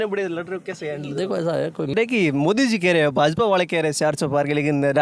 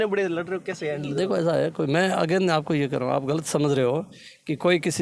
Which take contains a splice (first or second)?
first